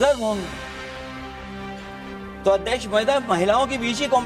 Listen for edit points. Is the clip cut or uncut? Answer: uncut